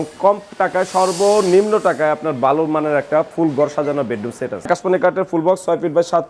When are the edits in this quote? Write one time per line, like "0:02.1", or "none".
0:04.7

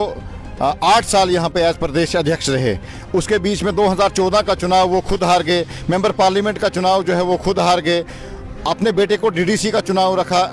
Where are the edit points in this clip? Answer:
none

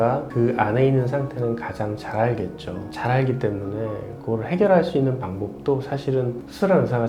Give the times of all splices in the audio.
none

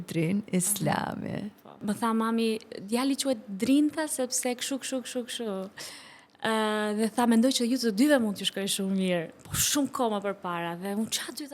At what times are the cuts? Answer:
0:01.8

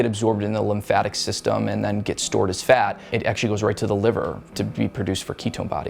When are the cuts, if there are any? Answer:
0:03.1

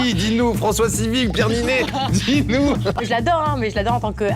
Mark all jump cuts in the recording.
0:03.0

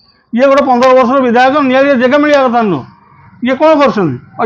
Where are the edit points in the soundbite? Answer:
none

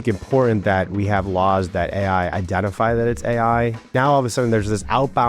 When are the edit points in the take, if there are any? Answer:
0:03.9

